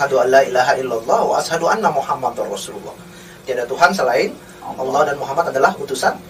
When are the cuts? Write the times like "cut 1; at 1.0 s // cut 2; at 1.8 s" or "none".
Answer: none